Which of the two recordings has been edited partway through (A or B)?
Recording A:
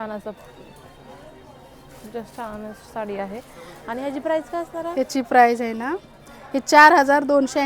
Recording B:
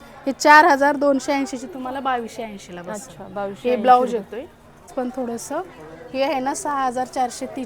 B